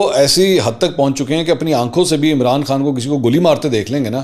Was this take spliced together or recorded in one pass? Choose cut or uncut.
uncut